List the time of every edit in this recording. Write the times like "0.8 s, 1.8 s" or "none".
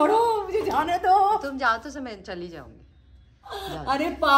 3.2 s